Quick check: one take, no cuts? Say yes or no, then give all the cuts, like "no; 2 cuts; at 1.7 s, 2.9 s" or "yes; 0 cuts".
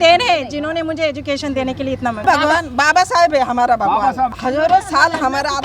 no; 2 cuts; at 2.2 s, 4.4 s